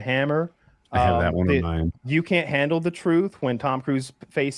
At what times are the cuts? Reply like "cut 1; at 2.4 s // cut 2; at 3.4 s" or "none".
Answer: none